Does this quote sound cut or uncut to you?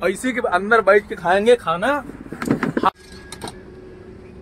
cut